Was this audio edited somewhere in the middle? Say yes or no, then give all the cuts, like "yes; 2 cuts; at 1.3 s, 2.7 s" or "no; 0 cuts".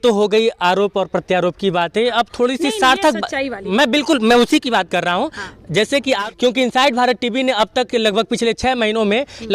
yes; 1 cut; at 6.2 s